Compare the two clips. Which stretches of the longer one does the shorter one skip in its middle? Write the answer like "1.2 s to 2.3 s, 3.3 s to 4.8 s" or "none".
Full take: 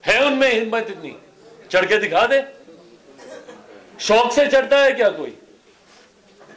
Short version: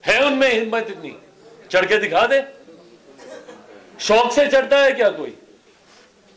none